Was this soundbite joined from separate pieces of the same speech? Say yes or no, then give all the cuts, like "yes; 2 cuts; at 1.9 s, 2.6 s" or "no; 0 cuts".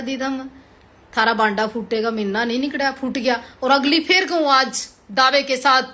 no; 0 cuts